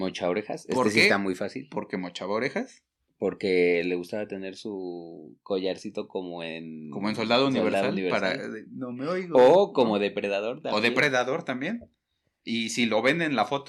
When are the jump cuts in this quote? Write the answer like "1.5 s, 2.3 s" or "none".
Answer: none